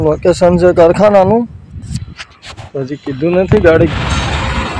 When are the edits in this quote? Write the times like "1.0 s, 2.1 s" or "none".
3.9 s